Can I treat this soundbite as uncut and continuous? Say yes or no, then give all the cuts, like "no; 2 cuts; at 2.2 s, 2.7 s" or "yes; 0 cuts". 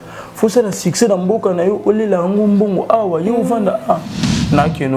yes; 0 cuts